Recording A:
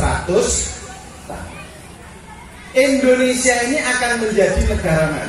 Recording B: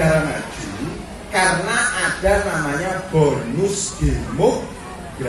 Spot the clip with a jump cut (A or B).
A